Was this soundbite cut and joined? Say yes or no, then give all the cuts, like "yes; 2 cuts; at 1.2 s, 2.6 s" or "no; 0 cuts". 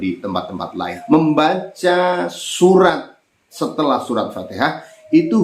yes; 1 cut; at 0.9 s